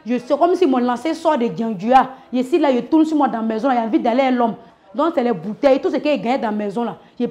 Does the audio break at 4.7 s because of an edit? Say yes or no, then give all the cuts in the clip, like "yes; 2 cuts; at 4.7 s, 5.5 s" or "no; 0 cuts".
yes; 1 cut; at 4.7 s